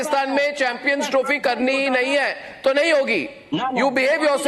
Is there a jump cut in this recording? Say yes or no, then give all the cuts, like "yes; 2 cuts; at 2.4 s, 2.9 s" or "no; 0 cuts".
no; 0 cuts